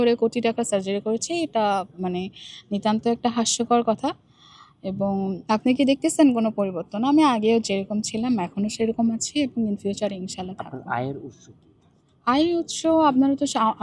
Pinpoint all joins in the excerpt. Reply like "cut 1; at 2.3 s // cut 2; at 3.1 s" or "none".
none